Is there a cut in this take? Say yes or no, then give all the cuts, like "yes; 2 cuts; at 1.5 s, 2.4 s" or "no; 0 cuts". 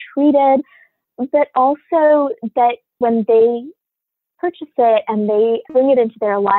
yes; 2 cuts; at 3.0 s, 5.7 s